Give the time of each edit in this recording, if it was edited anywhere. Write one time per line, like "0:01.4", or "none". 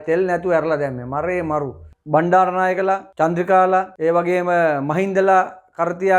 0:01.9